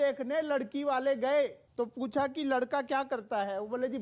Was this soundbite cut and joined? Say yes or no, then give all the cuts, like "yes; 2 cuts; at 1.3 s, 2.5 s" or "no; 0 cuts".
yes; 1 cut; at 1.6 s